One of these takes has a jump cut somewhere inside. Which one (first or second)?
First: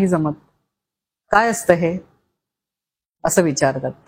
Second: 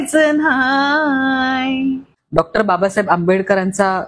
second